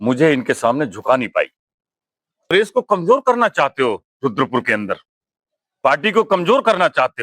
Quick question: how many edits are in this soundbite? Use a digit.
1